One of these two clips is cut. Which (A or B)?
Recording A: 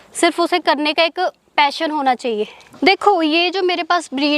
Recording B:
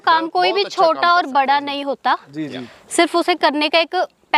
A